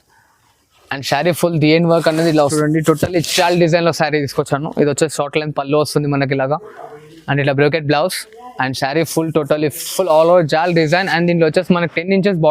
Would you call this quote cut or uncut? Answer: cut